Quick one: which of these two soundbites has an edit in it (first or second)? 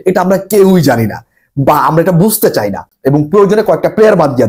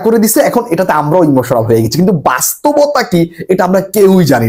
first